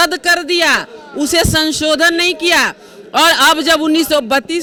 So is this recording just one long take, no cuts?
yes; 0 cuts

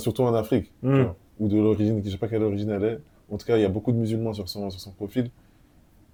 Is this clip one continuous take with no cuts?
yes; 0 cuts

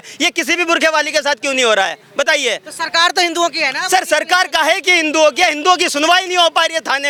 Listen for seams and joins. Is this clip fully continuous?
yes; 0 cuts

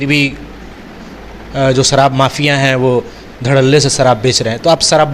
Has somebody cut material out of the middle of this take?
no; 0 cuts

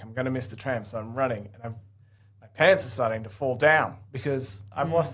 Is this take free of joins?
yes; 0 cuts

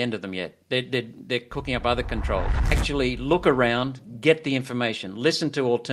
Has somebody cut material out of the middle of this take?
yes; 1 cut; at 2.8 s

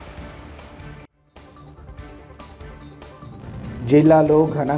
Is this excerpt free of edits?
no; 1 cut; at 3.1 s

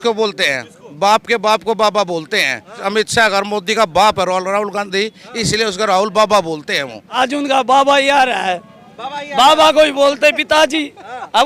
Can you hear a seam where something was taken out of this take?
yes; 2 cuts; at 2.8 s, 7.0 s

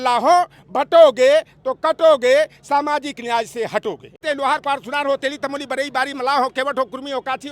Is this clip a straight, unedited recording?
no; 1 cut; at 4.2 s

